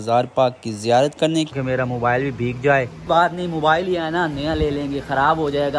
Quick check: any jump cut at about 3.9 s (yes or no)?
no